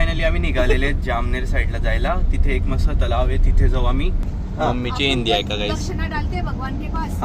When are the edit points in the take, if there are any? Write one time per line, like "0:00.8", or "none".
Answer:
0:04.2